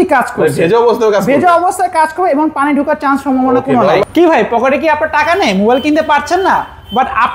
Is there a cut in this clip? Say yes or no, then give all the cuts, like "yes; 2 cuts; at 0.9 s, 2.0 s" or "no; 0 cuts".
yes; 1 cut; at 4.0 s